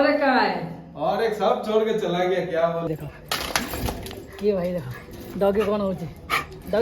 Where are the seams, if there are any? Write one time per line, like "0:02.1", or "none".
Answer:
0:02.9